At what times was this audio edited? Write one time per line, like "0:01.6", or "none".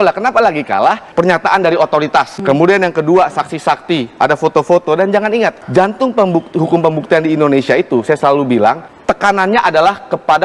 0:01.0
0:02.3
0:05.6
0:08.9